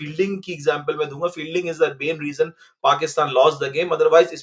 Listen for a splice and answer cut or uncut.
uncut